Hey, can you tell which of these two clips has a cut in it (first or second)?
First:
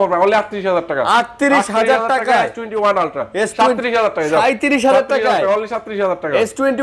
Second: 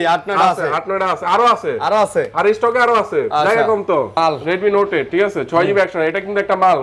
second